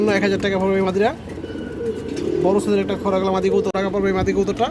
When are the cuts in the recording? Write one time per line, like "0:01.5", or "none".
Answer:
0:03.7

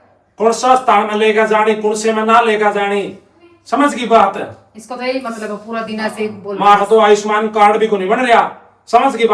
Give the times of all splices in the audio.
none

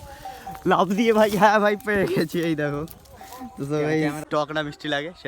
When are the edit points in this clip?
0:04.2

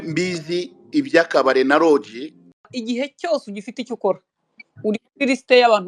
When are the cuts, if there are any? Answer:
0:02.7

